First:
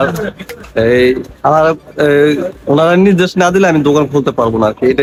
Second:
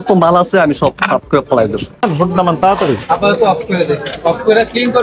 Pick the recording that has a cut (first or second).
second